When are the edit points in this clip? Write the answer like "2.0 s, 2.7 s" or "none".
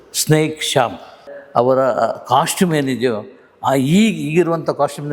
1.3 s